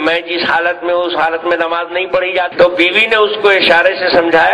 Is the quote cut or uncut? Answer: cut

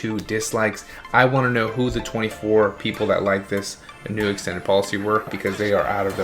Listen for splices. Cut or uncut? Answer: cut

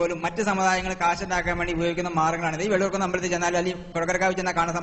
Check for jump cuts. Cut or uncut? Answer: uncut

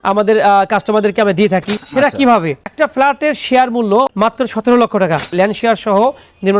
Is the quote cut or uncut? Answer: cut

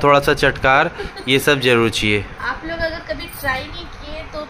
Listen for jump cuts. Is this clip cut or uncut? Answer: uncut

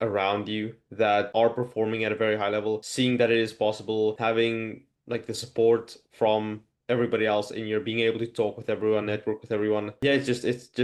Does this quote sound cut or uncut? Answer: uncut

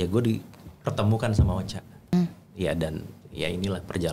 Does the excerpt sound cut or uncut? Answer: cut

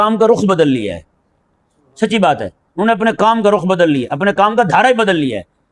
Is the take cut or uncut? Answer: uncut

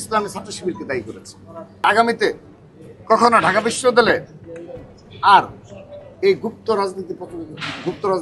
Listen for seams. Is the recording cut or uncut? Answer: cut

